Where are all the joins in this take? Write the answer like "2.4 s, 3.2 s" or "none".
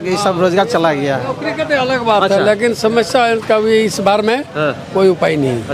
none

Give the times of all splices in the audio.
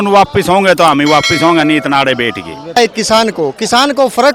2.8 s

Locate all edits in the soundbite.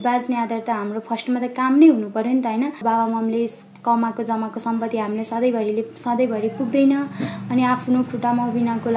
2.8 s

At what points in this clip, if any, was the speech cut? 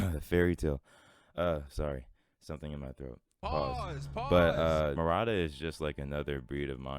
5.0 s

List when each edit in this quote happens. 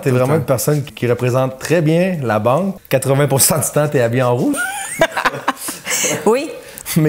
0.9 s, 2.8 s

